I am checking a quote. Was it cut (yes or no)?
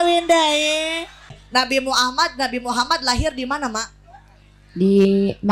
yes